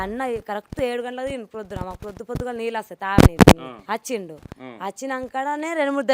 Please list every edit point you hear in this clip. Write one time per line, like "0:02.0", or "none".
0:03.7